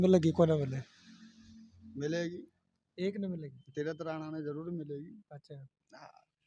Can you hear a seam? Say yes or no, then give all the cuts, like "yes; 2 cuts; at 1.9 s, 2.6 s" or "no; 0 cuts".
no; 0 cuts